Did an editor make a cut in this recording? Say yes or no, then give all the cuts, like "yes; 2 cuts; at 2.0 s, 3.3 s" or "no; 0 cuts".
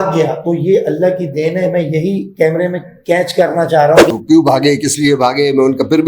yes; 1 cut; at 4.1 s